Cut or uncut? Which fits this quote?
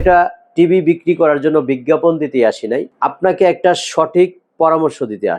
uncut